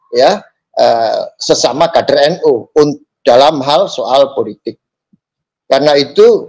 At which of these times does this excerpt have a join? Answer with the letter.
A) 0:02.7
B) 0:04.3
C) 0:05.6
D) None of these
C